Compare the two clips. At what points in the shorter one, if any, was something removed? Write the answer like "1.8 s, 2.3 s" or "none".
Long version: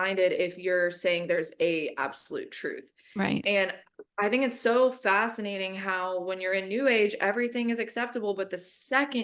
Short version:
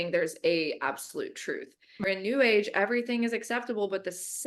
2.0 s